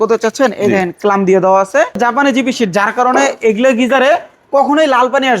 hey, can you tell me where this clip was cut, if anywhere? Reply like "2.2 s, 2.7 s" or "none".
2.0 s